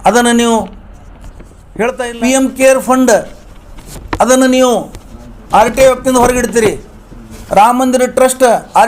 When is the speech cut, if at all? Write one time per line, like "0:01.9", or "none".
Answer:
0:01.8